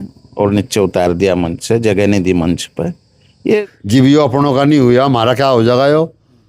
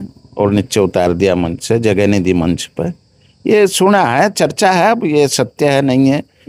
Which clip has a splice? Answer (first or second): first